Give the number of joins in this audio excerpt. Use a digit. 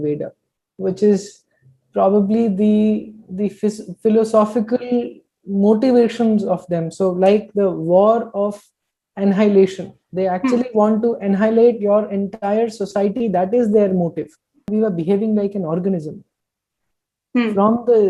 1